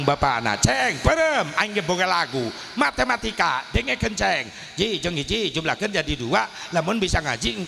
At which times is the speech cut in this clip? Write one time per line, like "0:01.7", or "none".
none